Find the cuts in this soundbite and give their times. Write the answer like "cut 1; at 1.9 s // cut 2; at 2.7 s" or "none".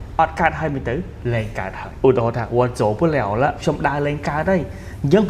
cut 1; at 1.8 s